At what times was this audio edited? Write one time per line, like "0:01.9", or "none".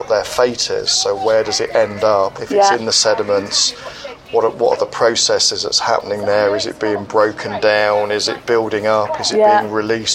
0:08.4